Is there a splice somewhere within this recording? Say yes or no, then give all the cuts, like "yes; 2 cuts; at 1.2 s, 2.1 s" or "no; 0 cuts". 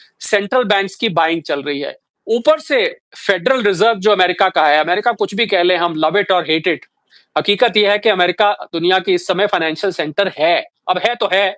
no; 0 cuts